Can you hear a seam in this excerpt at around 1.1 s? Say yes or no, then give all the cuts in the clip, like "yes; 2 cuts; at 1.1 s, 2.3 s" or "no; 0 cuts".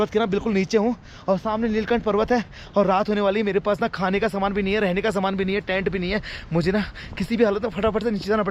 no; 0 cuts